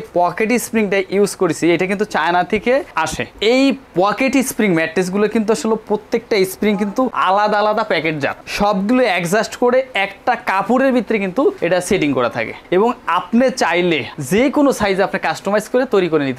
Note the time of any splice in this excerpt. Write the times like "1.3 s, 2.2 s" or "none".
none

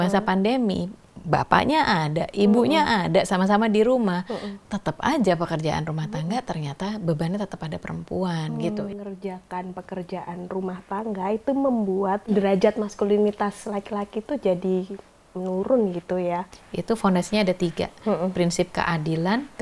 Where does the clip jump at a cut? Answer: 8.8 s, 12.3 s, 16.5 s

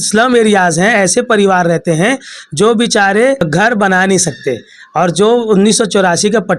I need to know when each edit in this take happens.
3.5 s

